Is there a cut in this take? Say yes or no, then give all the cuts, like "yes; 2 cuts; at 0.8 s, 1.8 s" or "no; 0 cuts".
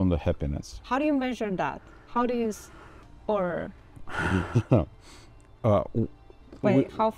no; 0 cuts